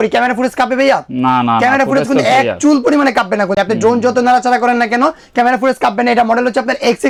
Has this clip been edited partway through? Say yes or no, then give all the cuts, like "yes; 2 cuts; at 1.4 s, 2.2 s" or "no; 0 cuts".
no; 0 cuts